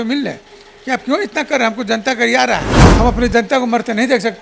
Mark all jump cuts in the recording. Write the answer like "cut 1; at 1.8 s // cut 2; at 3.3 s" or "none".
cut 1; at 2.8 s